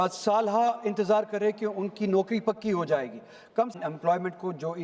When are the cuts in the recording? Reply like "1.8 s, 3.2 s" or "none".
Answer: 3.8 s